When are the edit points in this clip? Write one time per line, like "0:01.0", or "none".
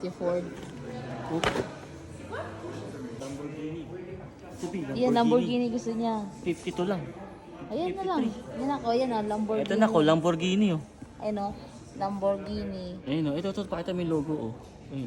0:03.2